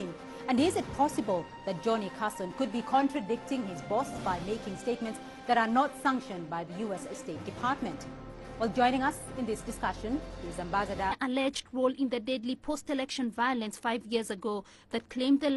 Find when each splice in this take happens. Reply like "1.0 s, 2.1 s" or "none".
none